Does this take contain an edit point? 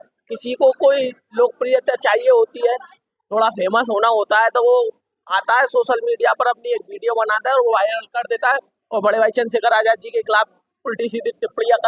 no; 0 cuts

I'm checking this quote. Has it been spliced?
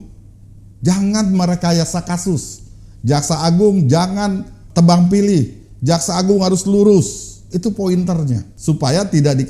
no; 0 cuts

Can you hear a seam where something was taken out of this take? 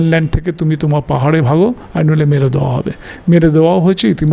no; 0 cuts

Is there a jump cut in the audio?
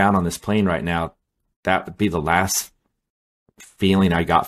no; 0 cuts

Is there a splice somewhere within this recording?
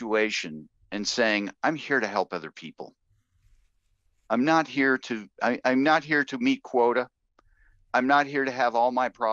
no; 0 cuts

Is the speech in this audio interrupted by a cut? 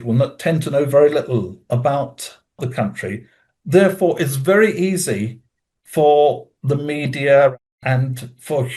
no; 0 cuts

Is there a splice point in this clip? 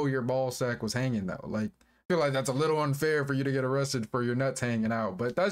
no; 0 cuts

